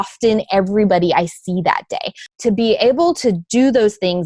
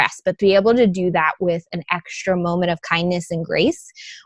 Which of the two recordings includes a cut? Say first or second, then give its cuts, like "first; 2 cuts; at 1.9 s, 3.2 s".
first; 1 cut; at 2.3 s